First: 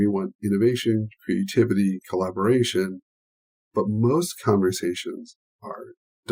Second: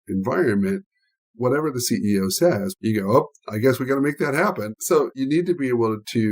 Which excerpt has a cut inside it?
second; 2 cuts; at 2.7 s, 5.1 s

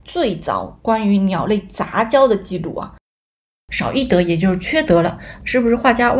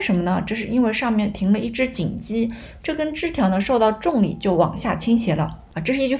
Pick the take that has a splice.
first; 1 cut; at 3.2 s

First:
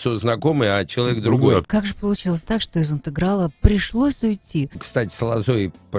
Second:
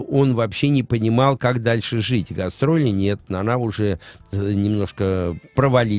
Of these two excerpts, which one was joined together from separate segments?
first; 2 cuts; at 1.7 s, 4.8 s

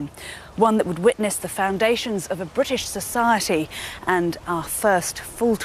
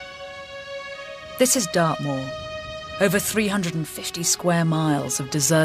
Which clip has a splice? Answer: first; 1 cut; at 3.6 s

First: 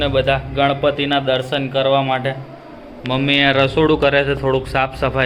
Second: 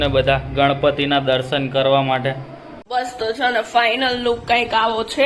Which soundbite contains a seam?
second; 1 cut; at 2.9 s

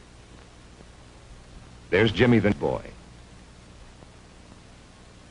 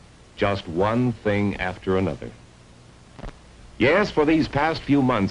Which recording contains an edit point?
first; 1 cut; at 3.6 s

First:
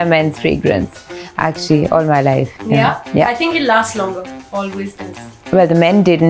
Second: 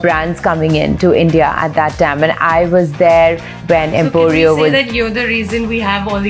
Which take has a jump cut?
first; 1 cut; at 2.5 s

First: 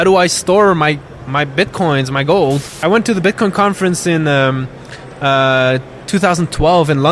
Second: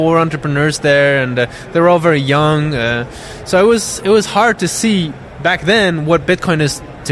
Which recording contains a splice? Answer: first; 1 cut; at 2.7 s

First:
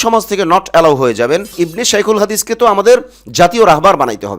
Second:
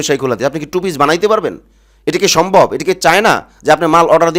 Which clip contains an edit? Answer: first; 1 cut; at 1.5 s

